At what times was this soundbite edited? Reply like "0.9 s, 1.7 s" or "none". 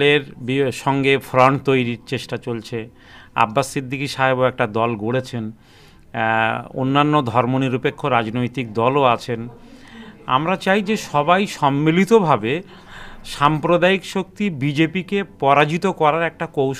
none